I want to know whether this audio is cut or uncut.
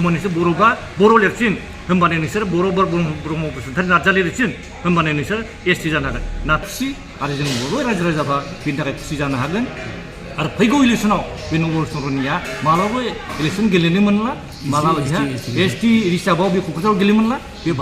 cut